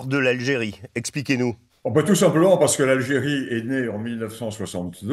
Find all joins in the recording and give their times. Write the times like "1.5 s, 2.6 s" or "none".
1.7 s